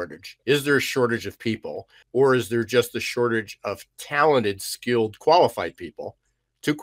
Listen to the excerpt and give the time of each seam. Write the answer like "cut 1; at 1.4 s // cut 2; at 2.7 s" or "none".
cut 1; at 2.0 s